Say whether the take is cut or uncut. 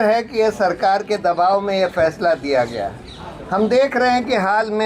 uncut